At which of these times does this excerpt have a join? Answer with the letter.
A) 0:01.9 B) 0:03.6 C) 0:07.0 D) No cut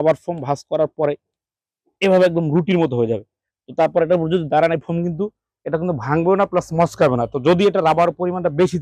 D